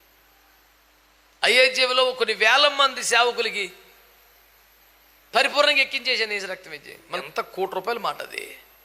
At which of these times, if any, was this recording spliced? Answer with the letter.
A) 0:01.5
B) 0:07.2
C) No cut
B